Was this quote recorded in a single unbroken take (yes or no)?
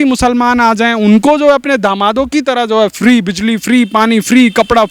yes